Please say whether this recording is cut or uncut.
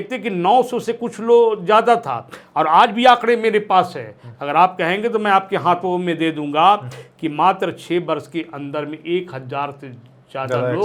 uncut